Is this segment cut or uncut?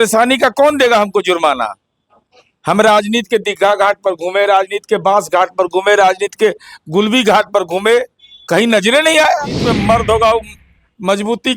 cut